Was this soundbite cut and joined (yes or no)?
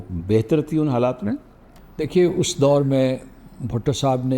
no